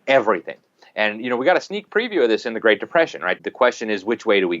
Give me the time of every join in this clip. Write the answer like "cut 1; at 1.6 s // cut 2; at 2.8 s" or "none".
cut 1; at 3.4 s